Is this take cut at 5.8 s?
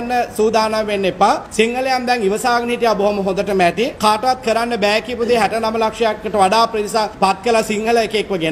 no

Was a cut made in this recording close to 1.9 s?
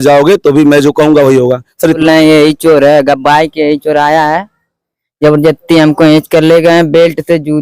yes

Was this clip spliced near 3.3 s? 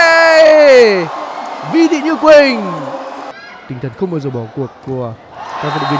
yes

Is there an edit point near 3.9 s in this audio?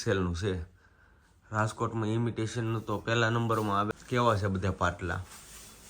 yes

